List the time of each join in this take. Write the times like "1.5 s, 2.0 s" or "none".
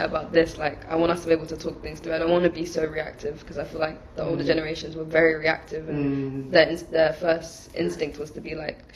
none